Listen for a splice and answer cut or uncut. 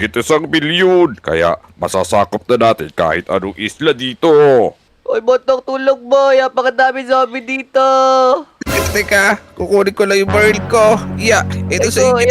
cut